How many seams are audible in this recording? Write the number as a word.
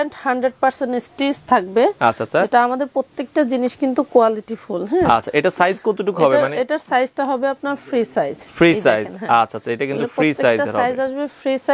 zero